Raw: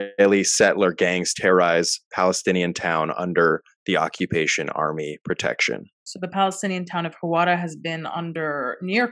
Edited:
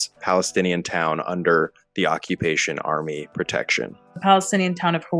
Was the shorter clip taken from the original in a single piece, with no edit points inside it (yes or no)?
no